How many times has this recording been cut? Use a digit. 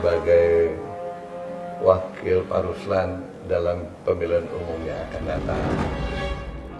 0